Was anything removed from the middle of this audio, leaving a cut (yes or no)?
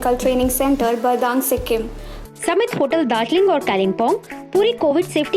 yes